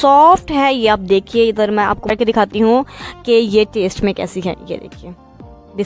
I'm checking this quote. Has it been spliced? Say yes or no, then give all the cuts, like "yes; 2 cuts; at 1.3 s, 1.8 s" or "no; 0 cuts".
yes; 1 cut; at 2.1 s